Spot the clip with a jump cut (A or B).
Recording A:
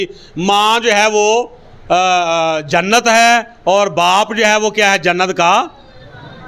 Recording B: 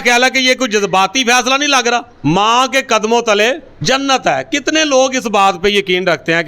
B